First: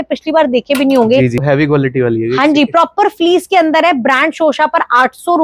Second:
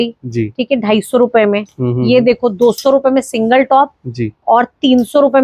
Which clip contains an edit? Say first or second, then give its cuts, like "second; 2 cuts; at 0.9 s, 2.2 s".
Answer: first; 1 cut; at 1.4 s